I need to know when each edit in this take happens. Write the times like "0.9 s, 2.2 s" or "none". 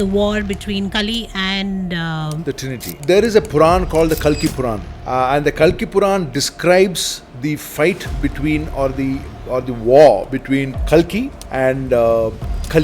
3.0 s, 4.9 s, 10.8 s, 11.4 s